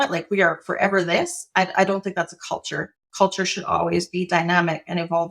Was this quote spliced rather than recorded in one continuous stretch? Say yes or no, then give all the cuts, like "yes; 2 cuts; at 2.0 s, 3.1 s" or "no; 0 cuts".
yes; 1 cut; at 3.0 s